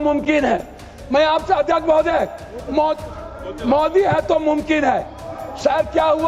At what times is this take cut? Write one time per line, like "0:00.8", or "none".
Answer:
none